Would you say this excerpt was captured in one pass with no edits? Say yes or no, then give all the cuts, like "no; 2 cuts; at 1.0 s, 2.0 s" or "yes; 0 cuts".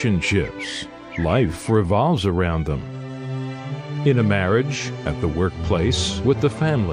yes; 0 cuts